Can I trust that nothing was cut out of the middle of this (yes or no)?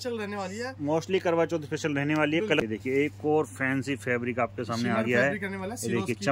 no